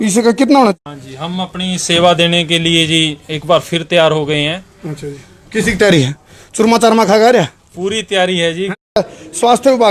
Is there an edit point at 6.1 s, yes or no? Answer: no